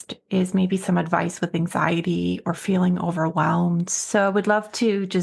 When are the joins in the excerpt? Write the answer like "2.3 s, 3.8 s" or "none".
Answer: none

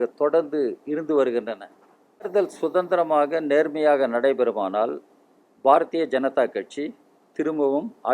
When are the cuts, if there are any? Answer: 2.3 s

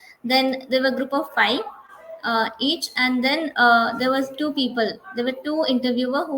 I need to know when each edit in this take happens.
none

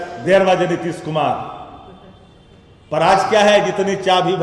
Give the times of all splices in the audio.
none

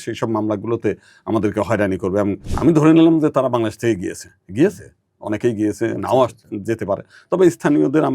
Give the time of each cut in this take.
2.5 s

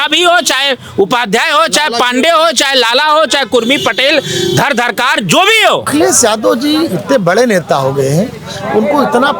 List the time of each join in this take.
5.9 s

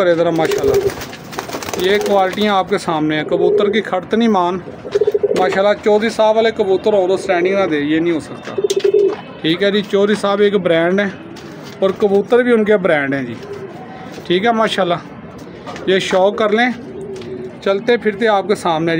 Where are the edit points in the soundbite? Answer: none

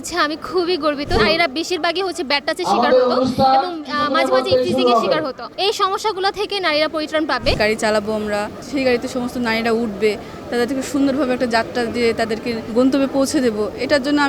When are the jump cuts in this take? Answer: 1.2 s, 5.4 s, 7.5 s, 8.6 s, 12.6 s

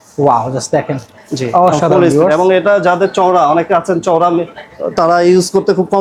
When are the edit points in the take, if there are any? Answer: none

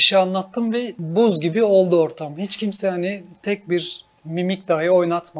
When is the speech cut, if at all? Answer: 1.0 s

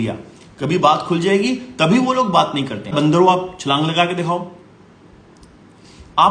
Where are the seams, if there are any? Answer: 2.9 s

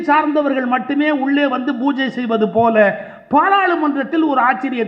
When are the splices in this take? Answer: none

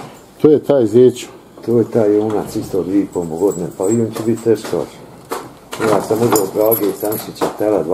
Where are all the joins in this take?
none

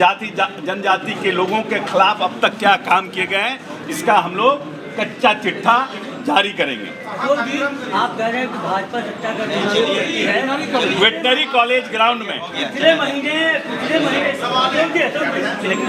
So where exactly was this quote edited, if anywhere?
none

